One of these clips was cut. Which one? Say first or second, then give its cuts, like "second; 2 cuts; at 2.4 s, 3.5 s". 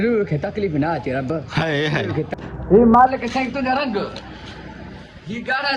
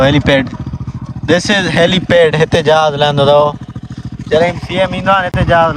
first; 1 cut; at 2.3 s